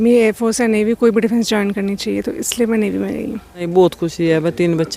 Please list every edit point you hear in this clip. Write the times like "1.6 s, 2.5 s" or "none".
3.6 s